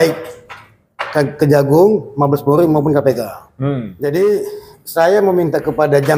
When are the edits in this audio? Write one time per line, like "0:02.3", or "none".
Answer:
0:03.9